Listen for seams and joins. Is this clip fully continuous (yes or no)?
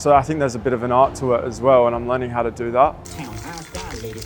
yes